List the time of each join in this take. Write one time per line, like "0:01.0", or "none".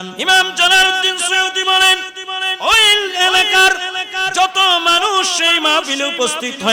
none